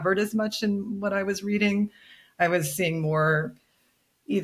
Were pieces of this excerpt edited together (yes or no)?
no